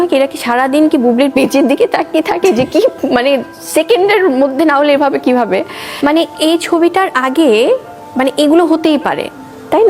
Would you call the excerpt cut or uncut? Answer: cut